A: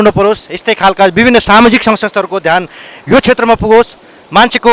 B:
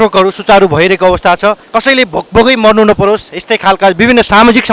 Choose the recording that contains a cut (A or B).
B